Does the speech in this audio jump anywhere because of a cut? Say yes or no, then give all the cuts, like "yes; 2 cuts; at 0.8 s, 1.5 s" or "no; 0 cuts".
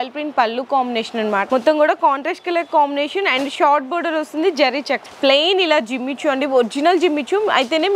yes; 2 cuts; at 1.4 s, 5.0 s